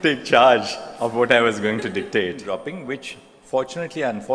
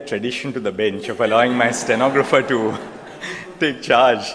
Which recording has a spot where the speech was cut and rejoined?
first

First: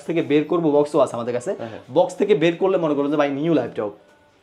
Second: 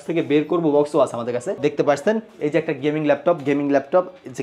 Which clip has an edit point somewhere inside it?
second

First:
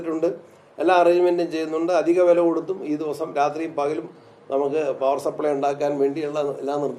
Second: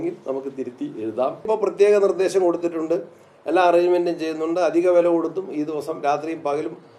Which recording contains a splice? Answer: second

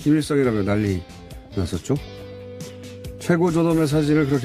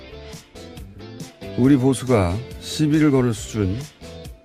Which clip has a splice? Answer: second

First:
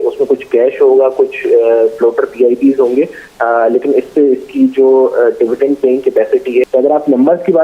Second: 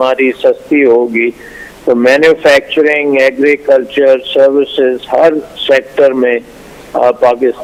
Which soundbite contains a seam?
first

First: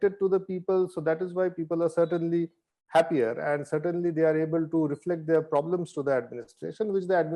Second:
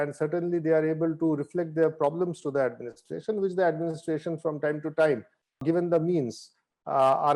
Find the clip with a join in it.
second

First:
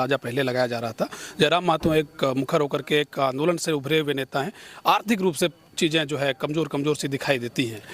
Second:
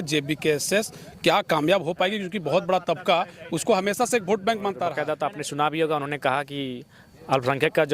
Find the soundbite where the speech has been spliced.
second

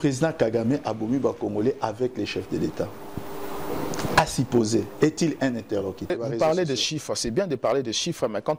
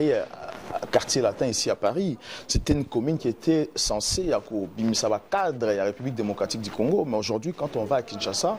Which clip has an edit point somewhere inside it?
first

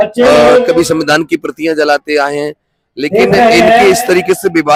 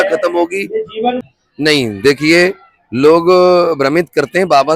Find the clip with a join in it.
second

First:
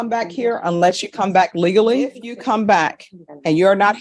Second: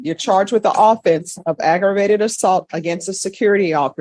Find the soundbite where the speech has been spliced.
first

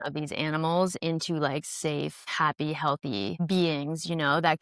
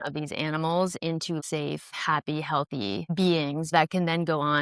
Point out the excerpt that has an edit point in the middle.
second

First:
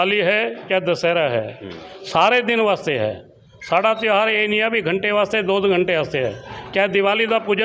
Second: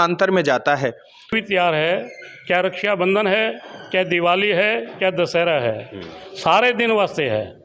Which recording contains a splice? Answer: second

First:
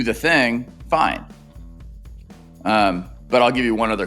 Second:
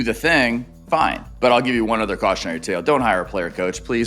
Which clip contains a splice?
second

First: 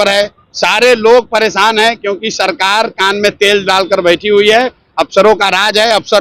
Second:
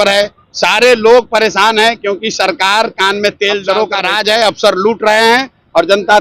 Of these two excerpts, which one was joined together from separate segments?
second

